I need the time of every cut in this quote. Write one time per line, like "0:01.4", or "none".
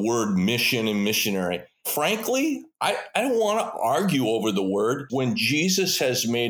0:01.9
0:05.0